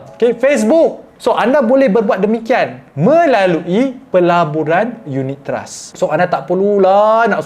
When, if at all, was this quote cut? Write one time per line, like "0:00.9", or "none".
0:01.1
0:05.8